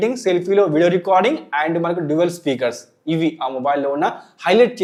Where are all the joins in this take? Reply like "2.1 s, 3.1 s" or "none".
none